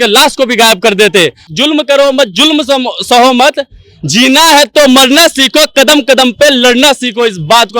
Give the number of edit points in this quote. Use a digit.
1